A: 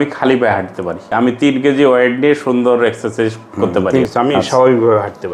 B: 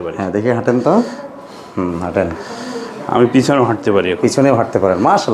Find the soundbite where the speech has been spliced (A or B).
A